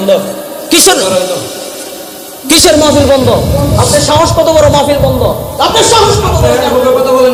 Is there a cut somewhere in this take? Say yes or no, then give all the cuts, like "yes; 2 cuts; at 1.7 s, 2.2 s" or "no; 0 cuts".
no; 0 cuts